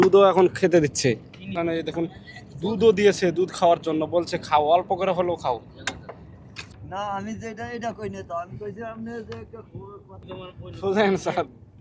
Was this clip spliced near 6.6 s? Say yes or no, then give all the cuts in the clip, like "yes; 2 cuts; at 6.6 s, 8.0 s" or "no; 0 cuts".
yes; 3 cuts; at 1.5 s, 6.6 s, 10.2 s